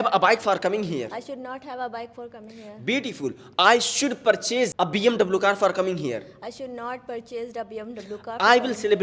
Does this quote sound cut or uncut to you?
cut